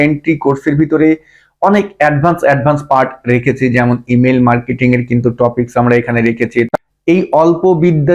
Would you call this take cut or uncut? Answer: cut